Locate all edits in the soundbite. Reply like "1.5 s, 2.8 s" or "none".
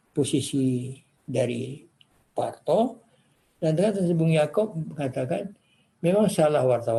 none